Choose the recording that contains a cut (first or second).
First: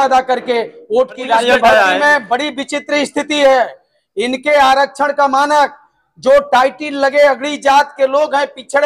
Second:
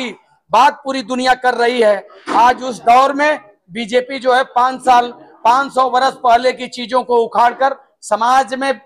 first